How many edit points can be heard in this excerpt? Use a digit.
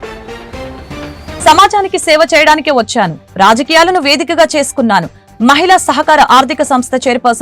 1